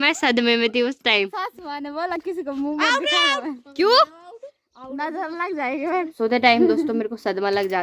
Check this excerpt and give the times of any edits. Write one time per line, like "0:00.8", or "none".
0:01.3
0:06.1

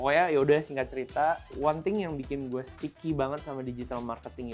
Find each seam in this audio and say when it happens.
0:01.5
0:02.8

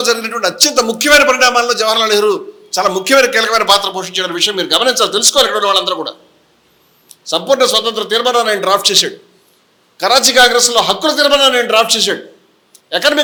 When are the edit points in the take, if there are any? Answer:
none

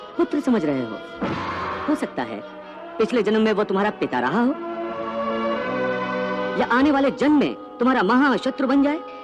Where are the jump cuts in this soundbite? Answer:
0:01.8

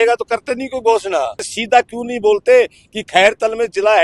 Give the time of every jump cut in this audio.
0:01.5

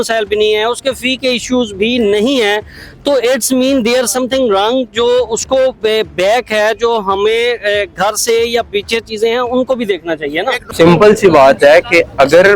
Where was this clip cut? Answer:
0:10.6

